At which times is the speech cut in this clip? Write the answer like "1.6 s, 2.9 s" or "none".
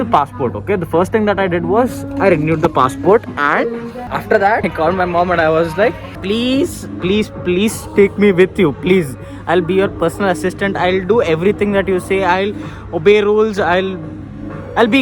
4.0 s, 4.6 s